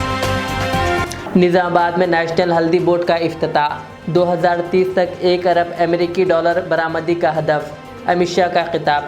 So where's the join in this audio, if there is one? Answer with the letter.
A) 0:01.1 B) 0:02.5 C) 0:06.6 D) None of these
D